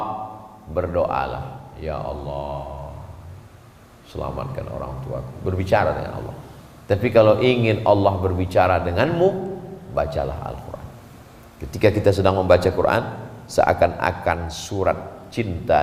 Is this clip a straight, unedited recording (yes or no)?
yes